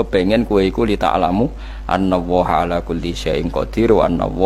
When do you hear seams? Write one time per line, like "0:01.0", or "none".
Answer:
none